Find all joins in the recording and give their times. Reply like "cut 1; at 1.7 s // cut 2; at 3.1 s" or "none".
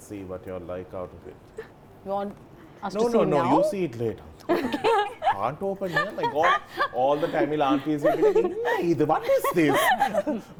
none